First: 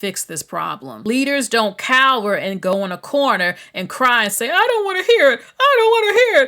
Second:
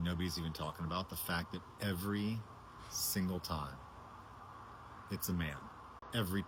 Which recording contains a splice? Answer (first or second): first